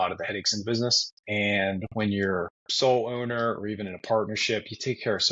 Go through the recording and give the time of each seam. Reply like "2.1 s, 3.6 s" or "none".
1.1 s, 2.6 s